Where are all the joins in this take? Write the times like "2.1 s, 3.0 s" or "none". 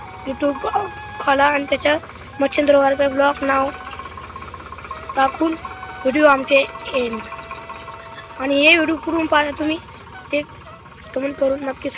none